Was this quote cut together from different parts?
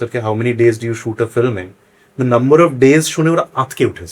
no; 0 cuts

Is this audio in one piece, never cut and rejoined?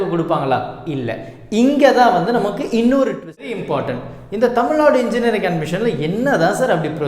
no; 1 cut; at 3.6 s

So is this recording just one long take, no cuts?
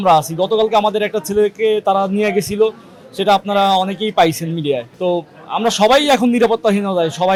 yes; 0 cuts

